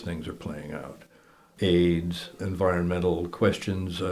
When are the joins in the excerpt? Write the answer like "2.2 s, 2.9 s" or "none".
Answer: 1.4 s, 2.4 s